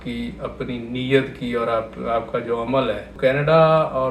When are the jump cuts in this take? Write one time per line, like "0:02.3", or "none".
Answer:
0:03.2